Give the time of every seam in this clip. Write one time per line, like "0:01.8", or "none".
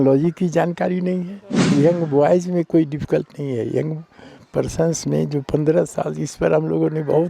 0:01.7

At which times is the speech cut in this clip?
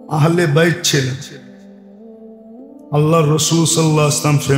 0:01.3
0:02.9

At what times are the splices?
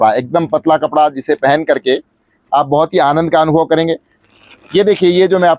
0:04.1

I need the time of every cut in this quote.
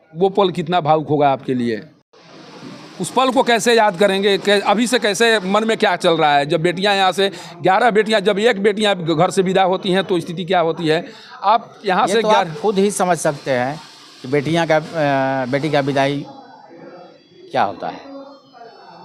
none

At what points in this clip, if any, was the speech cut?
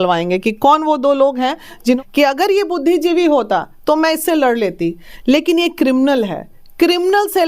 0:02.0

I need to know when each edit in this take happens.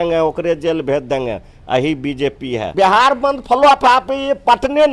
0:02.7

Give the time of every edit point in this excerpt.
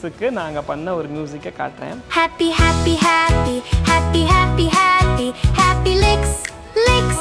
0:02.0

